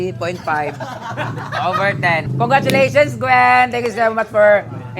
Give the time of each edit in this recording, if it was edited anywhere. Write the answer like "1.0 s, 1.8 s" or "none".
2.3 s